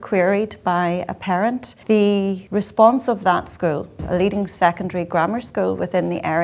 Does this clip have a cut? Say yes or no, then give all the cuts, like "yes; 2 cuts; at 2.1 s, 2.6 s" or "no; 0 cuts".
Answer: yes; 3 cuts; at 1.7 s, 2.4 s, 4.0 s